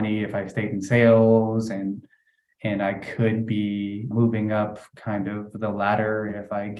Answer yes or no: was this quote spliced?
yes